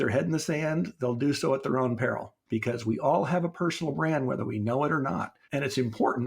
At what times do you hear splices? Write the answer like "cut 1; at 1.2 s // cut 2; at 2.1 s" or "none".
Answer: cut 1; at 2.3 s // cut 2; at 5.4 s